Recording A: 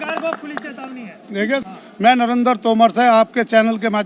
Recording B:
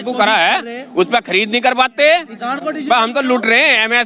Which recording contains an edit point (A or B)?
A